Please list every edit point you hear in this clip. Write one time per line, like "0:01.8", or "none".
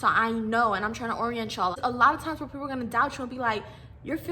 0:01.8